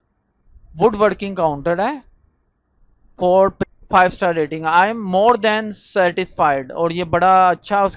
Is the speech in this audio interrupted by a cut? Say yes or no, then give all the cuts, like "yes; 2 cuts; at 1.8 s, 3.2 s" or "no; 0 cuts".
yes; 1 cut; at 3.6 s